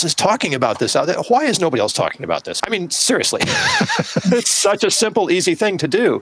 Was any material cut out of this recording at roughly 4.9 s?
no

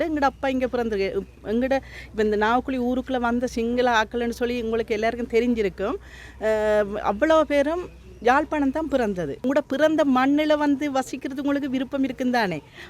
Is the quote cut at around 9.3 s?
yes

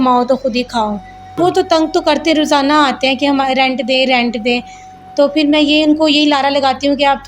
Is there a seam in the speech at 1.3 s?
yes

